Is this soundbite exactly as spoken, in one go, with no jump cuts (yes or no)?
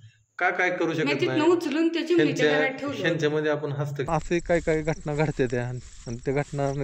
no